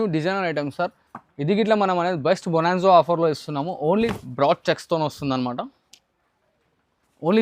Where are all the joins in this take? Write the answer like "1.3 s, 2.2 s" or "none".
4.1 s